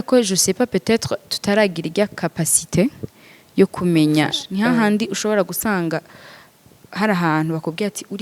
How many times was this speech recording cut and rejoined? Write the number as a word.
one